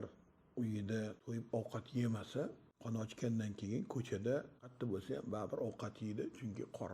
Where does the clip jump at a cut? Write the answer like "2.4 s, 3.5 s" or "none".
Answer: 1.2 s, 2.7 s, 4.7 s